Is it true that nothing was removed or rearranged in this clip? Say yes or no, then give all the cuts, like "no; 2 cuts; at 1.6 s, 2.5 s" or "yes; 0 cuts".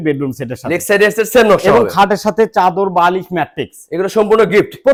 yes; 0 cuts